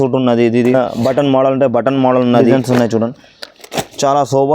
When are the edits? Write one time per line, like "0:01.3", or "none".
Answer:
0:00.7
0:02.5